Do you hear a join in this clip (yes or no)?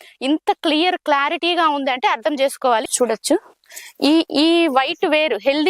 yes